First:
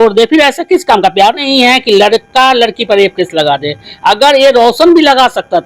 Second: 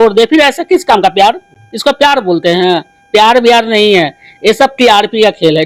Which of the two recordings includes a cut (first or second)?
first